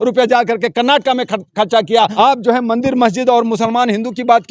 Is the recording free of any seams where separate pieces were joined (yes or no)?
no